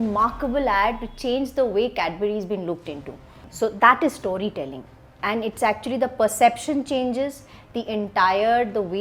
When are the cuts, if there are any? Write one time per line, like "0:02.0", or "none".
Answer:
0:03.4

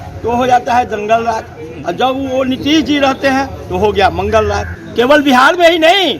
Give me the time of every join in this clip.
0:04.7

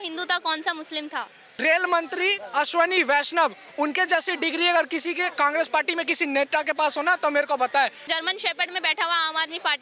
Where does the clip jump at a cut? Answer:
0:01.4
0:08.0

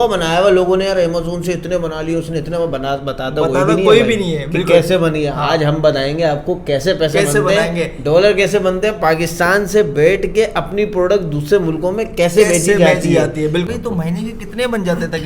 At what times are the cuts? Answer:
0:13.6

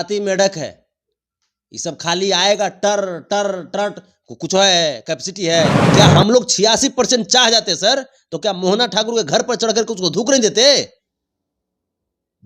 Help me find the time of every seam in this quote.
0:05.8

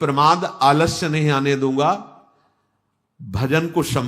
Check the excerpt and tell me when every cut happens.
none

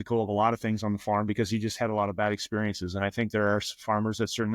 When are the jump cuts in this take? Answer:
none

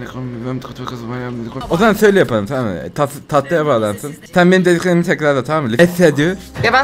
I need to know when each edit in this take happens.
0:01.5
0:05.7

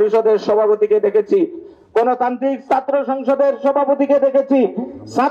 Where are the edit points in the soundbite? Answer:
none

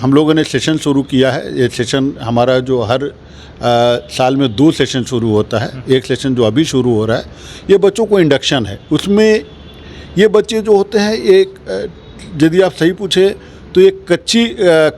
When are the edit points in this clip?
none

